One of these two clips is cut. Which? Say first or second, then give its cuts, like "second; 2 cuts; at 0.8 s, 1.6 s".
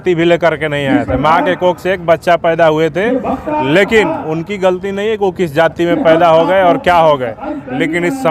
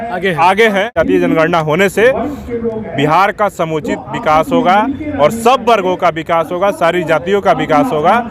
second; 1 cut; at 0.9 s